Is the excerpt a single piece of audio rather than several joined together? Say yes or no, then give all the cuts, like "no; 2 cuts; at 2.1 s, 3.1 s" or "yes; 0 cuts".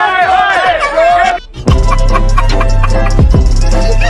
yes; 0 cuts